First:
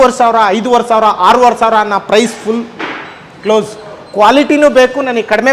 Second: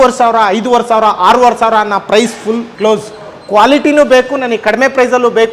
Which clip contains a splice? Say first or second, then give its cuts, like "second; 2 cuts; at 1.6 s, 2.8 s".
second; 1 cut; at 2.7 s